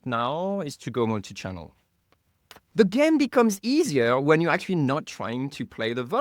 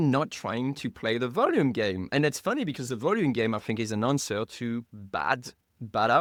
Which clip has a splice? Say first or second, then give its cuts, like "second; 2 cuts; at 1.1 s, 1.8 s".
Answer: first; 1 cut; at 2.6 s